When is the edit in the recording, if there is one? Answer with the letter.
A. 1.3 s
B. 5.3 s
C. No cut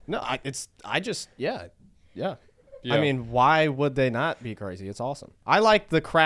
B